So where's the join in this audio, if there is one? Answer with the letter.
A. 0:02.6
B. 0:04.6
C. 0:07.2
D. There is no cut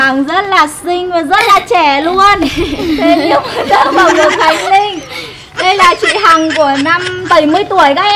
C